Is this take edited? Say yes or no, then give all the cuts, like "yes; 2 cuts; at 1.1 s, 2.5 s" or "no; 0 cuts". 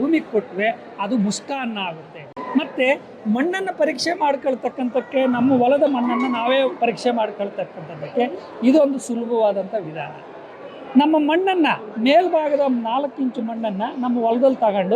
yes; 1 cut; at 2.3 s